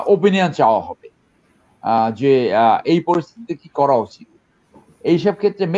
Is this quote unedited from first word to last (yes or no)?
yes